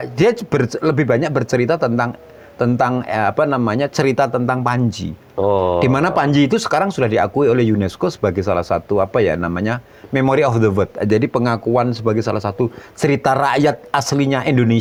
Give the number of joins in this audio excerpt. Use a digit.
0